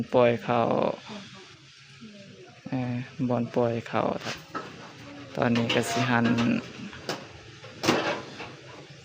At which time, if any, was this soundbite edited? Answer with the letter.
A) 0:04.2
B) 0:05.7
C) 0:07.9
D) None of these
A